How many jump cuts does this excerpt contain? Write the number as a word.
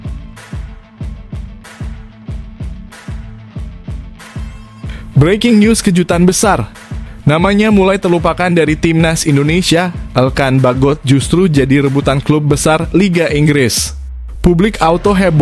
zero